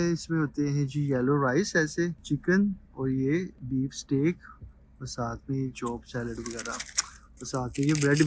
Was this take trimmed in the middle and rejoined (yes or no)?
no